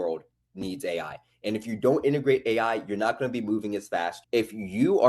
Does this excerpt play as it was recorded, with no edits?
no; 1 cut; at 4.2 s

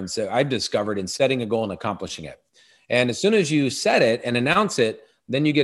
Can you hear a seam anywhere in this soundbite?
no; 0 cuts

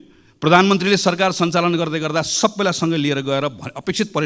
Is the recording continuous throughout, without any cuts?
yes; 0 cuts

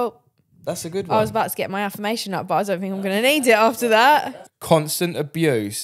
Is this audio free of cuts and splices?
no; 1 cut; at 4.4 s

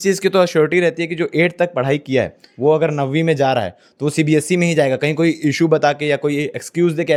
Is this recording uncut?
yes; 0 cuts

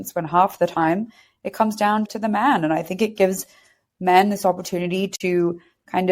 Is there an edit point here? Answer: yes; 1 cut; at 2.1 s

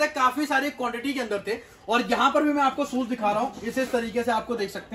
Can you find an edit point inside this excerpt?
no; 0 cuts

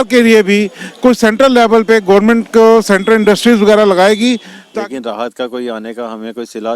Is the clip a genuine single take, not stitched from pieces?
no; 1 cut; at 4.6 s

